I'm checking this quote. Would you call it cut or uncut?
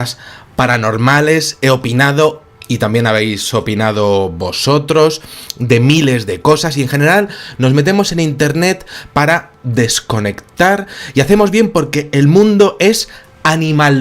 cut